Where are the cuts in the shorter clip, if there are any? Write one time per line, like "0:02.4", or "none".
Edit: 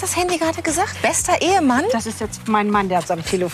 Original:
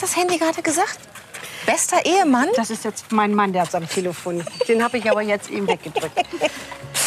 0:00.9